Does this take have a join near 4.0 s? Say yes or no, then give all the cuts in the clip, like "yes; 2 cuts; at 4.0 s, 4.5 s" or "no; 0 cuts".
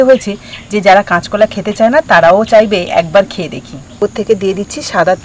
yes; 1 cut; at 4.0 s